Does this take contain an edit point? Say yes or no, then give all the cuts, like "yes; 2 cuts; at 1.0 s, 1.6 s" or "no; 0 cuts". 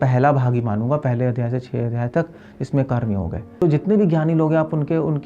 yes; 1 cut; at 3.6 s